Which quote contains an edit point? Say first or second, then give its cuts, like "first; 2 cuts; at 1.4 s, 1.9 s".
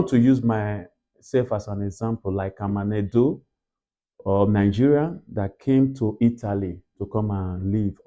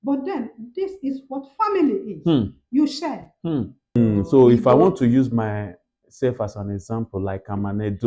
second; 1 cut; at 3.9 s